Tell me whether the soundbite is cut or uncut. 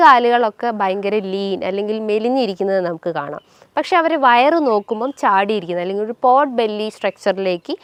uncut